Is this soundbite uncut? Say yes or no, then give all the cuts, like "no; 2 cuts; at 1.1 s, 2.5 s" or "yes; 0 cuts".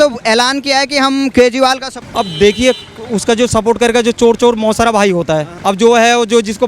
no; 2 cuts; at 2.0 s, 5.5 s